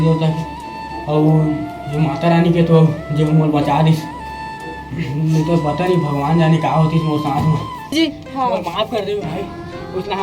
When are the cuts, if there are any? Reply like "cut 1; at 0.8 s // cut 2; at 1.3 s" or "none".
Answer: cut 1; at 7.9 s